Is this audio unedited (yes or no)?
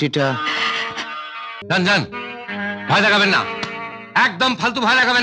no